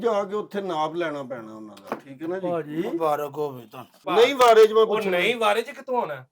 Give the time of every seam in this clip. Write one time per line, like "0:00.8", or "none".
0:04.0